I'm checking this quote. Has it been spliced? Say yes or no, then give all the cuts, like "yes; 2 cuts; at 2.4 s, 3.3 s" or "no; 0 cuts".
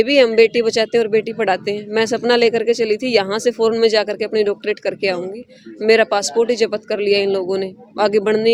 no; 0 cuts